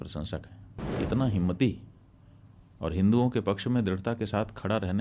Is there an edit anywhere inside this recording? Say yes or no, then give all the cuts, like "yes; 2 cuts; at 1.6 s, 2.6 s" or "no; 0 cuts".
yes; 1 cut; at 0.9 s